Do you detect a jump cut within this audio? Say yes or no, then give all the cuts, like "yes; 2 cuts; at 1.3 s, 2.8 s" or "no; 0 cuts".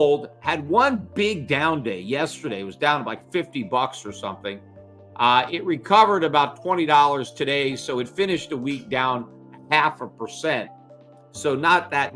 no; 0 cuts